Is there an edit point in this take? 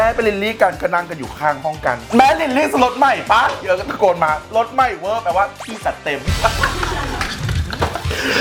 no; 0 cuts

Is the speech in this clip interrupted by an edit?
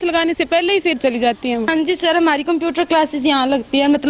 yes; 1 cut; at 1.7 s

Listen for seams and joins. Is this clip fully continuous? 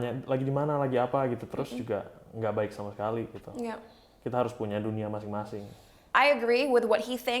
yes; 0 cuts

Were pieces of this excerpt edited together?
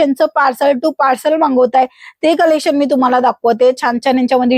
no; 0 cuts

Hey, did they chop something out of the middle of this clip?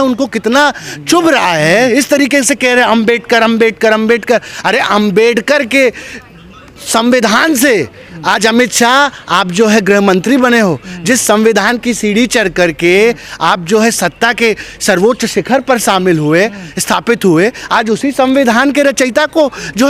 no; 0 cuts

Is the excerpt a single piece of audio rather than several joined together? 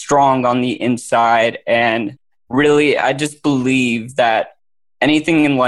yes; 0 cuts

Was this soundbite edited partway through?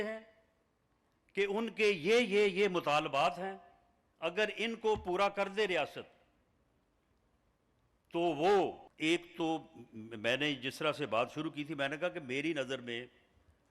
yes; 1 cut; at 8.9 s

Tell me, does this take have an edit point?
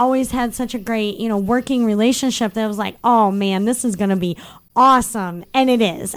no; 0 cuts

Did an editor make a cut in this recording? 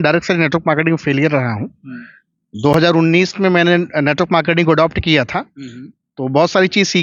no; 0 cuts

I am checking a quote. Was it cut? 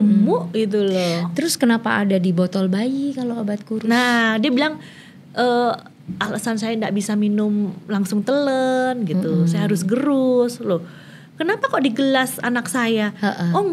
no; 0 cuts

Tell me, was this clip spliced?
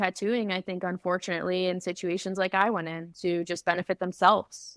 no; 0 cuts

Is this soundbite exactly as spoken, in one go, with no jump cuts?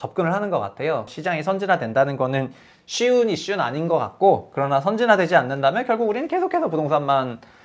no; 1 cut; at 1.1 s

